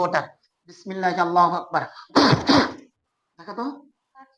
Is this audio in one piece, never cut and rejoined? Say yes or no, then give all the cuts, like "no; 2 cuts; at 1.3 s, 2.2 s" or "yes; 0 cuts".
no; 1 cut; at 2.0 s